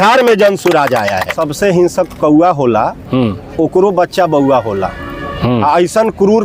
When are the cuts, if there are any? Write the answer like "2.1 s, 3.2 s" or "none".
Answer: 1.4 s